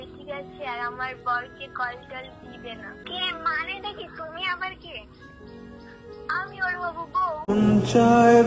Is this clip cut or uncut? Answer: cut